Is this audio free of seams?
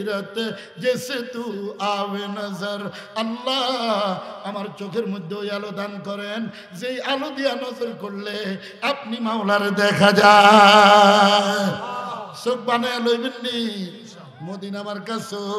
yes; 0 cuts

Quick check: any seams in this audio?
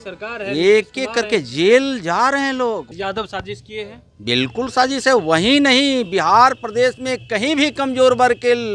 yes; 1 cut; at 2.9 s

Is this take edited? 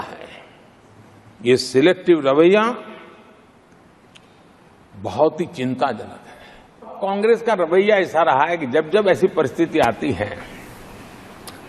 yes; 1 cut; at 6.9 s

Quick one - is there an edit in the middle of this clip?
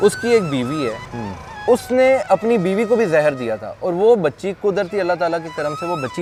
no; 0 cuts

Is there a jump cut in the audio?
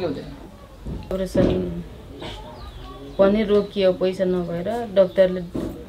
yes; 1 cut; at 1.2 s

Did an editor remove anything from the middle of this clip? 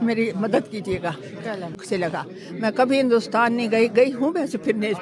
yes; 1 cut; at 1.8 s

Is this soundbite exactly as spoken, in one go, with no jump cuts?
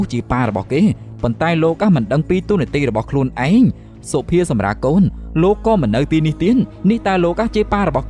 yes; 0 cuts

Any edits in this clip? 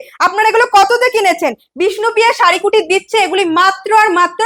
no; 0 cuts

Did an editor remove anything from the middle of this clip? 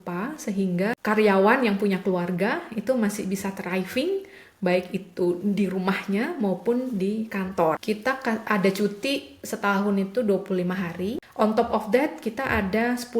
yes; 3 cuts; at 1.0 s, 7.8 s, 11.2 s

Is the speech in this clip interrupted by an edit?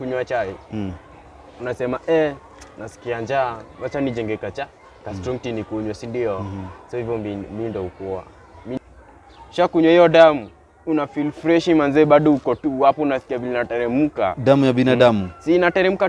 yes; 1 cut; at 8.8 s

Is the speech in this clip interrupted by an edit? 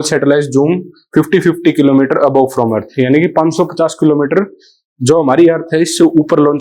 no; 0 cuts

